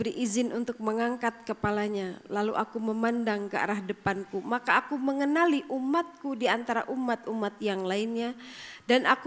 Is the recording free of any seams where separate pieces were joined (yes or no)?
yes